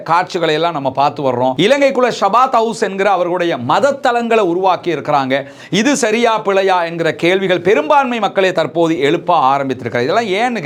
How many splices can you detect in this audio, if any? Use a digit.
0